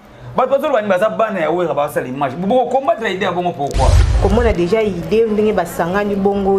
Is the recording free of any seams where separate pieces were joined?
no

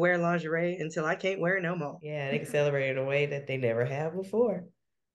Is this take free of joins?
no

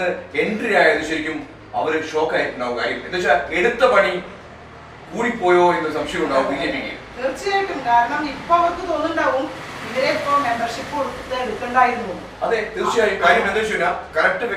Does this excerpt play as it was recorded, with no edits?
yes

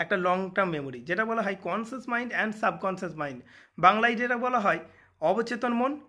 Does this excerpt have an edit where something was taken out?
no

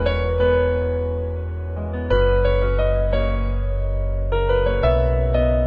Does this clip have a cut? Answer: no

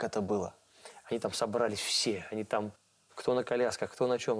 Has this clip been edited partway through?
no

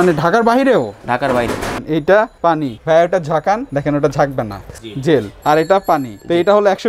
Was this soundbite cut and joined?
yes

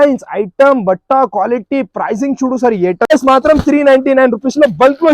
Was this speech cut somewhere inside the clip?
yes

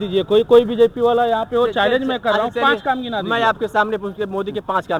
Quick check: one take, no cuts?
yes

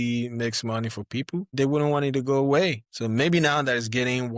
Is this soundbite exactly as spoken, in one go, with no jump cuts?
no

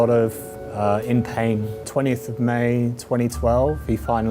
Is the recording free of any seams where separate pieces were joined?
no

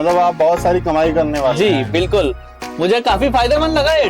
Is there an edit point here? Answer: no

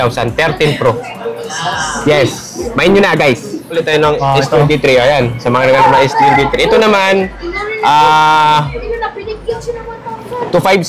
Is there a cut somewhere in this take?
yes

